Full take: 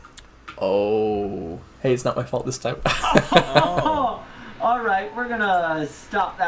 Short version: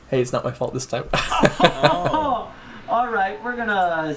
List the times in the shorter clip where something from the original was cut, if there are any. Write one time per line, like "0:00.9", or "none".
none